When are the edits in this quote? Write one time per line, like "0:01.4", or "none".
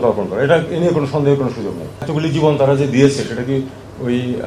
0:02.1